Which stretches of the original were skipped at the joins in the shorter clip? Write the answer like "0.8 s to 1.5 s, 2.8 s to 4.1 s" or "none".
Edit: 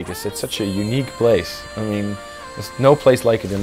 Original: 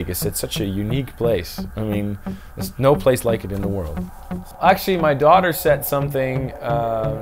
none